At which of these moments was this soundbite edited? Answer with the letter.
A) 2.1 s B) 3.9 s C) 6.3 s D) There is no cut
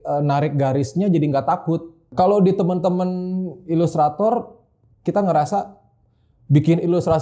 A